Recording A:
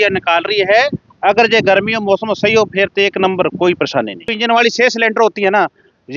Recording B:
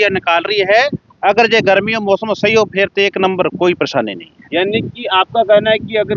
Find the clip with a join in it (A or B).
A